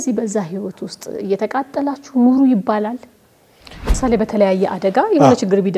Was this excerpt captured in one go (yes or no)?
no